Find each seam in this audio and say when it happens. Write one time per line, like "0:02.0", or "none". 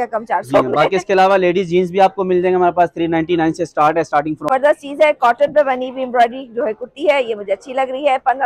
0:04.5